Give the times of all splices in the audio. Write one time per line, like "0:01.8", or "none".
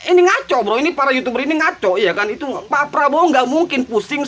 0:02.6